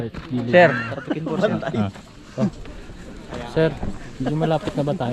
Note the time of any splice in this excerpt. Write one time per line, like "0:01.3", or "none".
none